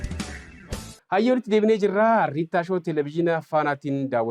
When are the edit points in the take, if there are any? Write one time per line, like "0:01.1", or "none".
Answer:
0:00.9